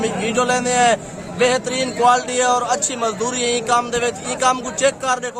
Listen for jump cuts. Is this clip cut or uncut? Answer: uncut